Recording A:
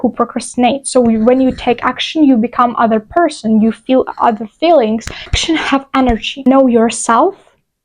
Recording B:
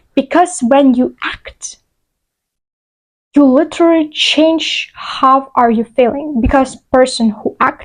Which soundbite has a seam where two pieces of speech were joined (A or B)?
A